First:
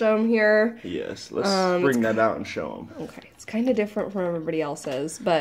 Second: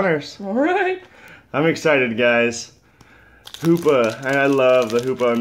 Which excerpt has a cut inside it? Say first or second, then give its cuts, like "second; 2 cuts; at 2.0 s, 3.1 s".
second; 1 cut; at 2.0 s